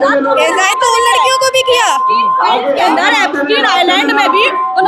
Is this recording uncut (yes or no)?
yes